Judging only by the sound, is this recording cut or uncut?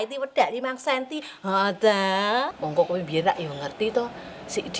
uncut